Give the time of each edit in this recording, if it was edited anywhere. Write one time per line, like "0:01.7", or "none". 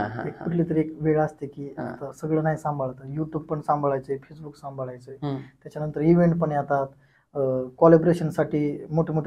none